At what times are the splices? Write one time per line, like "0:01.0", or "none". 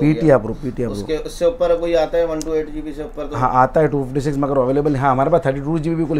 none